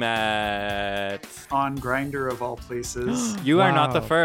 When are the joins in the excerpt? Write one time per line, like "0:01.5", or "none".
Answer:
0:01.4